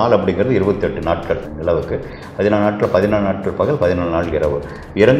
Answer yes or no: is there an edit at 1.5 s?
yes